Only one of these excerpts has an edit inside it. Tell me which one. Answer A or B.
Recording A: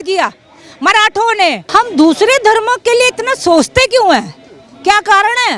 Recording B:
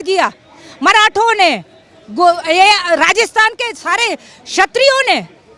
A